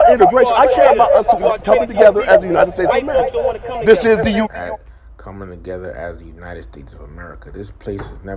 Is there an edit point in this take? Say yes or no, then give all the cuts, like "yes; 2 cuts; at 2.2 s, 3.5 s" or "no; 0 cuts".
no; 0 cuts